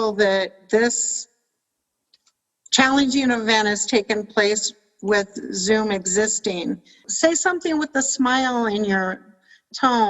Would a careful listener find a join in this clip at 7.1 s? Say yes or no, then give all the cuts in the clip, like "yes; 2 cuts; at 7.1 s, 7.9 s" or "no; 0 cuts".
yes; 1 cut; at 7.1 s